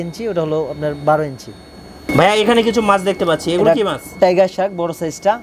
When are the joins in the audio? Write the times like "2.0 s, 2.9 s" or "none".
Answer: none